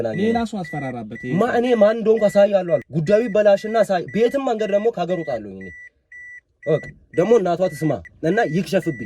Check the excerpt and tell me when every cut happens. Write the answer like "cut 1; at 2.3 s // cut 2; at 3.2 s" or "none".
cut 1; at 2.9 s // cut 2; at 8.1 s